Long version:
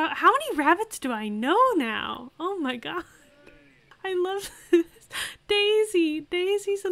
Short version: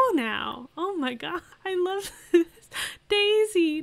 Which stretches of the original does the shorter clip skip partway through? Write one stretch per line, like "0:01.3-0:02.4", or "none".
0:03.1-0:03.9